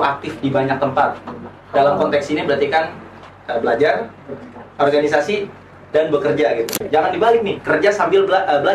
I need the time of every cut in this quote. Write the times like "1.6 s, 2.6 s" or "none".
6.7 s